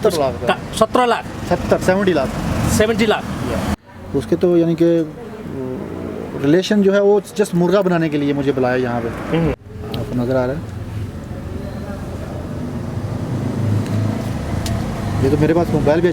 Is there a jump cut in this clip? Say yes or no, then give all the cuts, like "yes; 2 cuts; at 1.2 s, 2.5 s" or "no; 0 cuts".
yes; 2 cuts; at 3.8 s, 9.6 s